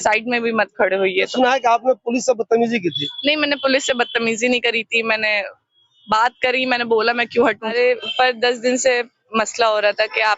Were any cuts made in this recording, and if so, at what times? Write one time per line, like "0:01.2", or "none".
0:01.3
0:07.7